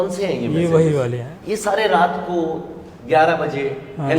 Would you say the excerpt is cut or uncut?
cut